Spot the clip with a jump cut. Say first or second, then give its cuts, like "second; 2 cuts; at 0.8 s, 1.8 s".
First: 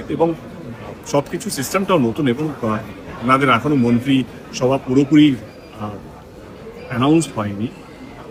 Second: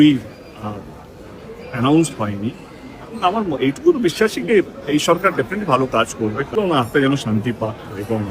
second; 1 cut; at 6.6 s